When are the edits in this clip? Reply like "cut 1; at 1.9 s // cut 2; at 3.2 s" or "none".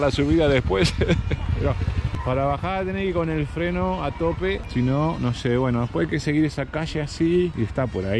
none